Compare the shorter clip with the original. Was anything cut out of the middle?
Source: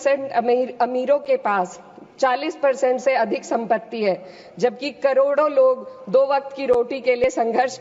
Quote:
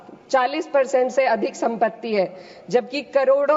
no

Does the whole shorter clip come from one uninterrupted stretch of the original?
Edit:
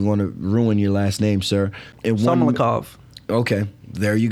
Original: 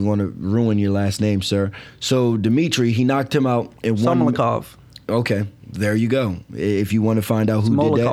no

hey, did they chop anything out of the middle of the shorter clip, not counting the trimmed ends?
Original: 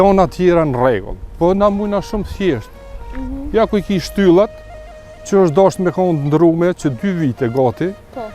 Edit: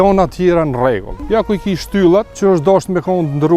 yes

